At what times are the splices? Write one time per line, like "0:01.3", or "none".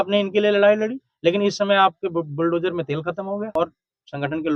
0:03.5